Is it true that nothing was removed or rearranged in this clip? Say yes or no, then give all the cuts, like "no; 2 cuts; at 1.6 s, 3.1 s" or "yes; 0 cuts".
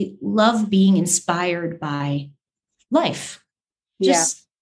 yes; 0 cuts